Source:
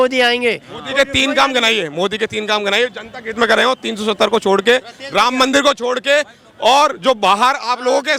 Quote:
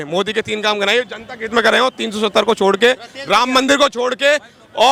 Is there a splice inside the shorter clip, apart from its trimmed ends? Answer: no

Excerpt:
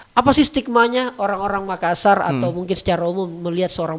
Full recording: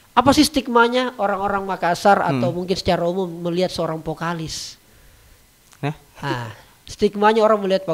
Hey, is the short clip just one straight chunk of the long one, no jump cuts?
yes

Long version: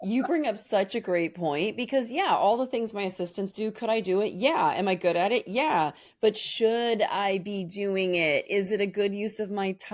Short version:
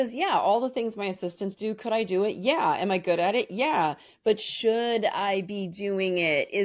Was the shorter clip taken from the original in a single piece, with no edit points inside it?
yes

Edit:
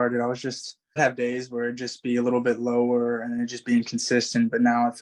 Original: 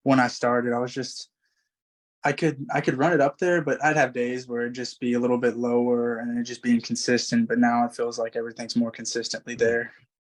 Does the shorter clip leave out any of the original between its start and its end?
yes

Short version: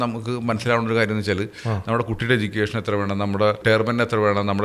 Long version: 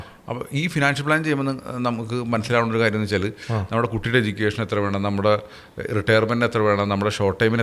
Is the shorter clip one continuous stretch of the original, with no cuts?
no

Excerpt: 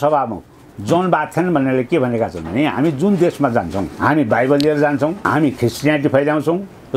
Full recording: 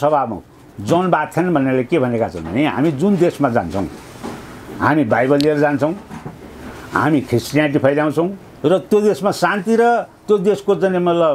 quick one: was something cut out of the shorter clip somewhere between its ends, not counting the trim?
yes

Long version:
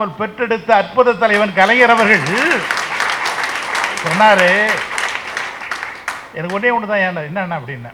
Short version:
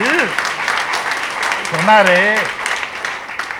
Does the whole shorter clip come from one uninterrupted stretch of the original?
yes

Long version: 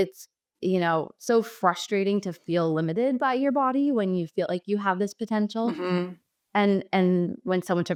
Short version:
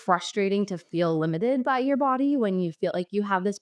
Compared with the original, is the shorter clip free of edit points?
yes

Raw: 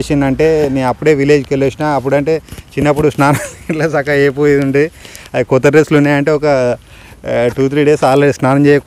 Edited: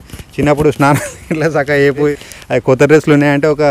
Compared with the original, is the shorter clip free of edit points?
no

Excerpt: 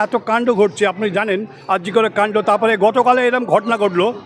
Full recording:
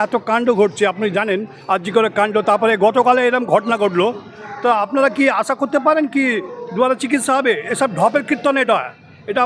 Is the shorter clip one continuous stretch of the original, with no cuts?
yes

